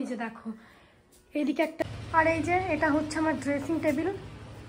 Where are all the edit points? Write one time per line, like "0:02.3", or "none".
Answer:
0:01.8